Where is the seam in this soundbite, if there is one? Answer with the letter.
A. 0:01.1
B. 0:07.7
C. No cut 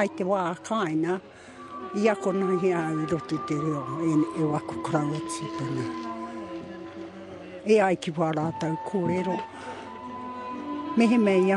C